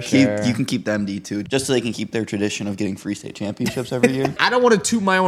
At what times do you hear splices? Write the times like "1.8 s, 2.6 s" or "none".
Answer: 1.4 s, 4.4 s